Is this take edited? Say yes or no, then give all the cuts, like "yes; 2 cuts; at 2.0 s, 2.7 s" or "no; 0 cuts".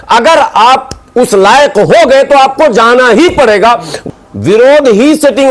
yes; 1 cut; at 3.9 s